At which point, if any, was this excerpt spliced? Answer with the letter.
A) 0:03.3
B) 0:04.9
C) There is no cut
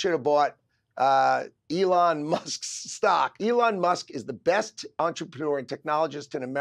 A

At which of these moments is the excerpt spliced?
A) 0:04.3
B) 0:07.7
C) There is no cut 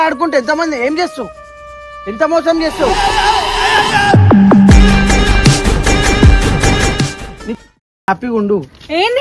B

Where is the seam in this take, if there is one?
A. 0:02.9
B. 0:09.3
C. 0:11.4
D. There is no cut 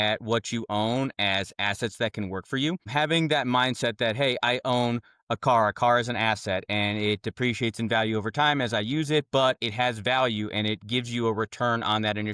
A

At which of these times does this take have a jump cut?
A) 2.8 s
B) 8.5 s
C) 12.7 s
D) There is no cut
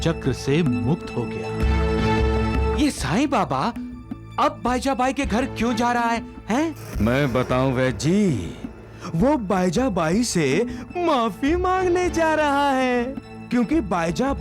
A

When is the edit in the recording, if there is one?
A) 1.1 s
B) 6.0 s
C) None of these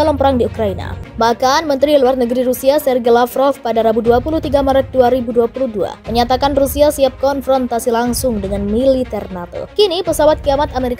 C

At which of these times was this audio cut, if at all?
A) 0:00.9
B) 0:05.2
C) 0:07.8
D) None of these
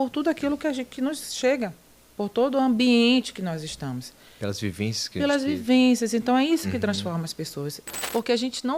C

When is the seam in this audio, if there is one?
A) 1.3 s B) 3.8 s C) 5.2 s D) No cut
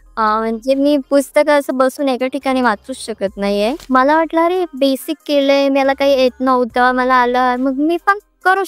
B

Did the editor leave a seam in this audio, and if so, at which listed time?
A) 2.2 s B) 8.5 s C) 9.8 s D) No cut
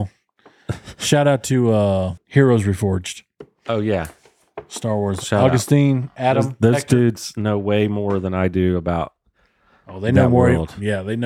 A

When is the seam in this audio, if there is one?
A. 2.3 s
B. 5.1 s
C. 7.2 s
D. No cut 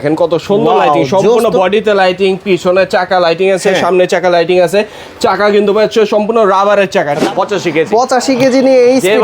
C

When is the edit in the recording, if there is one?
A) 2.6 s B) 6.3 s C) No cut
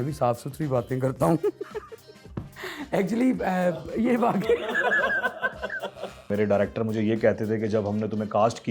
B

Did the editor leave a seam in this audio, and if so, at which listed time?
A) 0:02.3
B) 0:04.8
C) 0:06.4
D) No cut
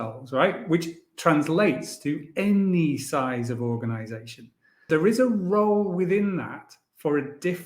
B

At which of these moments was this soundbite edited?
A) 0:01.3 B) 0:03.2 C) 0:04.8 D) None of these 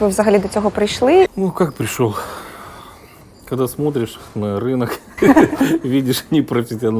A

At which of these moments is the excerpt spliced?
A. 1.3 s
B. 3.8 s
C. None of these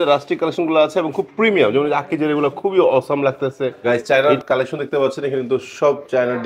B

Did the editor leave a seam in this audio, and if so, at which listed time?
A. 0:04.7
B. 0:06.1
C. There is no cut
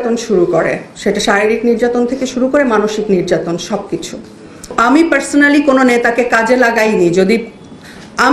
A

